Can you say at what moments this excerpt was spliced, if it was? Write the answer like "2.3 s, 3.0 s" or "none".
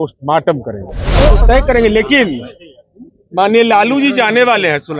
1.4 s